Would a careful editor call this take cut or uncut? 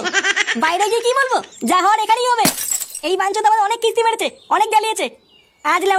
uncut